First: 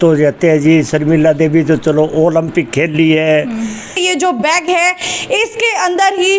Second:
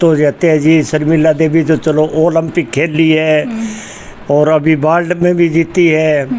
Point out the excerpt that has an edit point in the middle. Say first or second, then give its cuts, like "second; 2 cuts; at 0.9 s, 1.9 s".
first; 1 cut; at 4.0 s